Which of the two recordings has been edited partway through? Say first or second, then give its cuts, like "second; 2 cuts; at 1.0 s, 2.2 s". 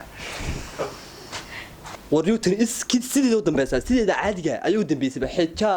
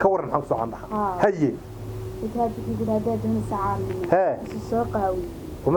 first; 1 cut; at 1.9 s